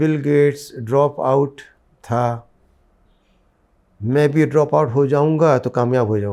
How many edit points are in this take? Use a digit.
0